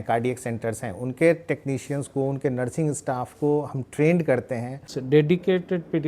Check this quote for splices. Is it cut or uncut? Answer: cut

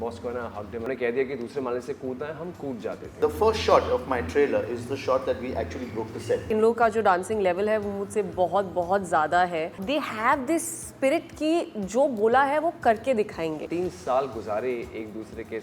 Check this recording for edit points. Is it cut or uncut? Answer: cut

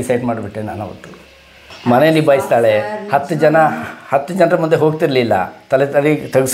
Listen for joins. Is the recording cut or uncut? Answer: cut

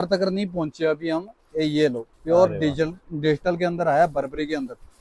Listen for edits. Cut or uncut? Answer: uncut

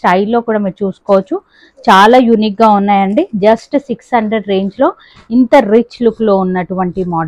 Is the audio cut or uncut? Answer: uncut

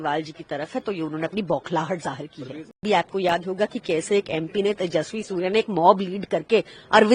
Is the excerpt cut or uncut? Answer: cut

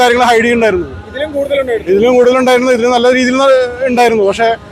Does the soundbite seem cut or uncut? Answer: uncut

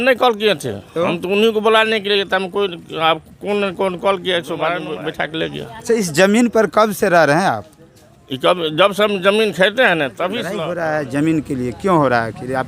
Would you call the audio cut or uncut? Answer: cut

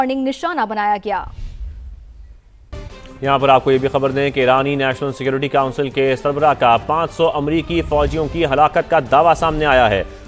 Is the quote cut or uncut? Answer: cut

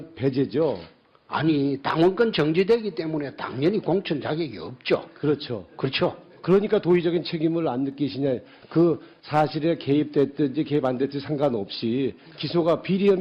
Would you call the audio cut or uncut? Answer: uncut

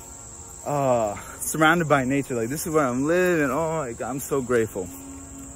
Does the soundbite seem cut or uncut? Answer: uncut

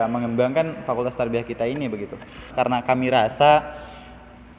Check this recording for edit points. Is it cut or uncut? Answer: cut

